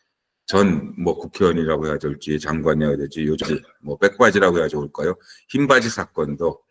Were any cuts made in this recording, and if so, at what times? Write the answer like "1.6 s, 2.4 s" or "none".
3.5 s